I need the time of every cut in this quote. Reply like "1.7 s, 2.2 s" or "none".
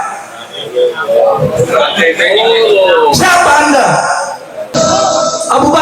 4.8 s

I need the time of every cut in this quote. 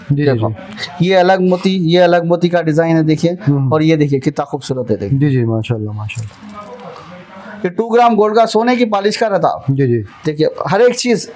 none

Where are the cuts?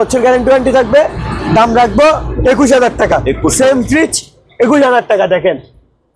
none

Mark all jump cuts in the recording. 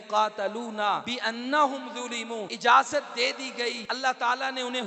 1.1 s, 2.5 s, 3.9 s

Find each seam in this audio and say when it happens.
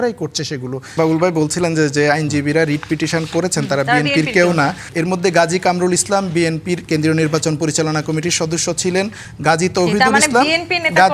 1.0 s, 4.9 s, 9.2 s

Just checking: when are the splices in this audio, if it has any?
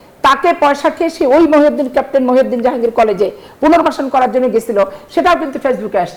none

